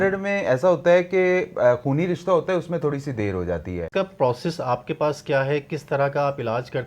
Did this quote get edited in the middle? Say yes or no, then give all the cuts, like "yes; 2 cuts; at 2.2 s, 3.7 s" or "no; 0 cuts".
yes; 1 cut; at 3.9 s